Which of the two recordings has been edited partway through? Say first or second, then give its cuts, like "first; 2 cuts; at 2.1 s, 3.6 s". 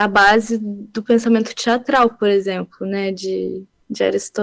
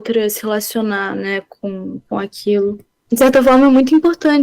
second; 1 cut; at 2.9 s